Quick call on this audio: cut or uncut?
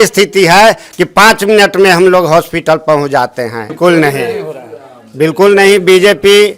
cut